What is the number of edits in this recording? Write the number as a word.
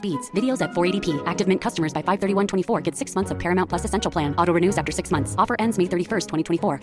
zero